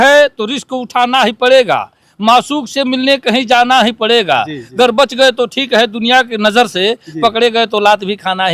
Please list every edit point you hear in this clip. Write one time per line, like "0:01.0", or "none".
none

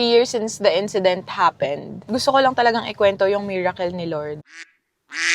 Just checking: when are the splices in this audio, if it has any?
0:02.0
0:04.4

